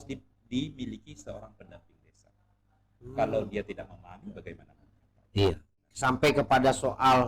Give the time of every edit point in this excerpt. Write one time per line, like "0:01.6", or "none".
0:05.9